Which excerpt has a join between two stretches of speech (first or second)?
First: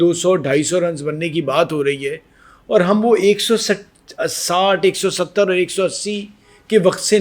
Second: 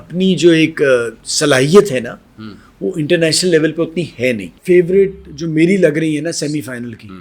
second